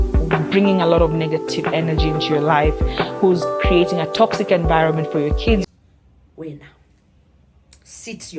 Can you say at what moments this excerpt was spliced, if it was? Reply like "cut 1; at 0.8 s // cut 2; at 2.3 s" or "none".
cut 1; at 5.6 s